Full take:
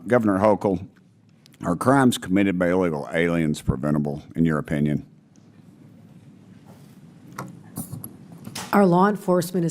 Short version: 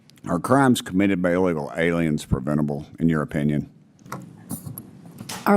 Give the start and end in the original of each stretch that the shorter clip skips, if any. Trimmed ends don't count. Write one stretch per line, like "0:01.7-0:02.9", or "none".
0:05.3-0:07.2